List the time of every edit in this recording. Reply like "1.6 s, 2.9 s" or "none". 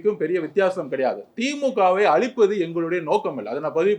none